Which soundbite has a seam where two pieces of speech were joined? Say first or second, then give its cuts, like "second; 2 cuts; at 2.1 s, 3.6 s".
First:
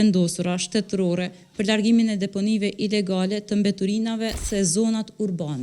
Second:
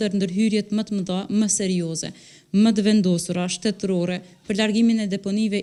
first; 1 cut; at 4.4 s